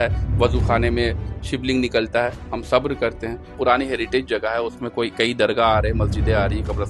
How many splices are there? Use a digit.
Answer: 1